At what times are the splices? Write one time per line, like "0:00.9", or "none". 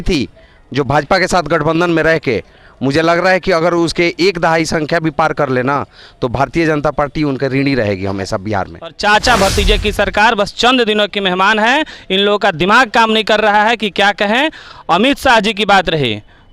0:08.9